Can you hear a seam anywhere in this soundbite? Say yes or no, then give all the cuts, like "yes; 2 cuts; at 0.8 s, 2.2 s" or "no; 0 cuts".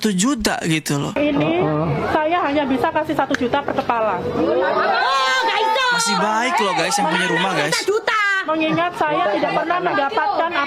yes; 1 cut; at 1.1 s